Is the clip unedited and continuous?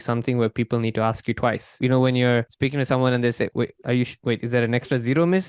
no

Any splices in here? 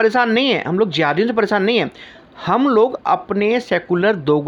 no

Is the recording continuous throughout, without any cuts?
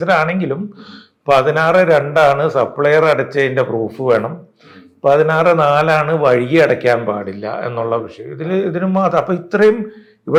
yes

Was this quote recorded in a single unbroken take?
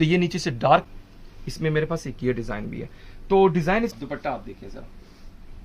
no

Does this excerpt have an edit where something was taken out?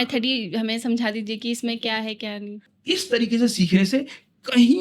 yes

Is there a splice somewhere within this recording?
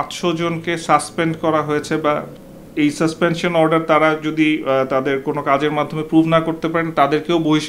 no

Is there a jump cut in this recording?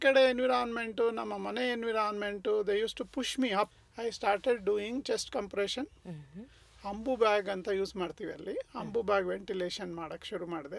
yes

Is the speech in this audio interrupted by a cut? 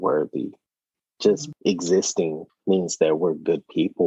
yes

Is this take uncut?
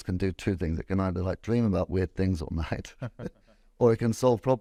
yes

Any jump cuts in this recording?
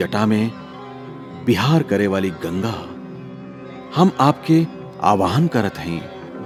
no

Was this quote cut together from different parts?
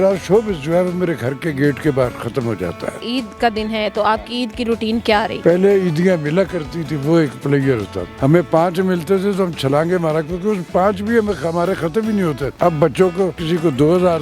yes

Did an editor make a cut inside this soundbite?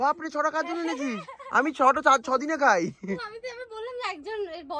no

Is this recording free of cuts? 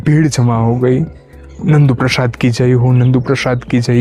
yes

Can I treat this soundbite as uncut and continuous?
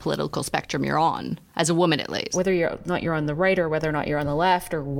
no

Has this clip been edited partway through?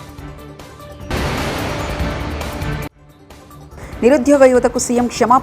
no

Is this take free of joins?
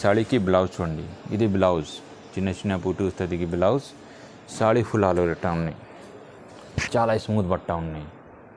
yes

